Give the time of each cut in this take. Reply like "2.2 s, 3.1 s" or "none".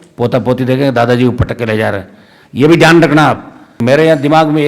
3.8 s